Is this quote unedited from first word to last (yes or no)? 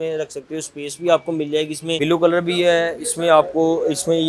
no